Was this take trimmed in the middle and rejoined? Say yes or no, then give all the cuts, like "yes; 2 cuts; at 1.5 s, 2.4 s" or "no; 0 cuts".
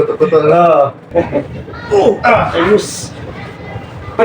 yes; 1 cut; at 1.1 s